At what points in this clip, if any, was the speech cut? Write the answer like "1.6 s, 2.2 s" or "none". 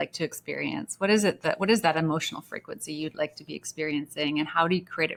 none